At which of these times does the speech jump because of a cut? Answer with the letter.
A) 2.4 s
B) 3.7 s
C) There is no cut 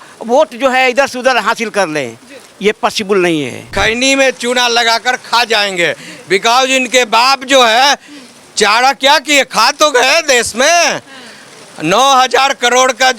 B